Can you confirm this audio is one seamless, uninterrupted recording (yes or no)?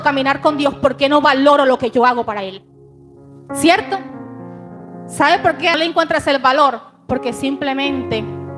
no